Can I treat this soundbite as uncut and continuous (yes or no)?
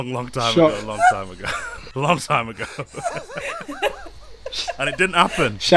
no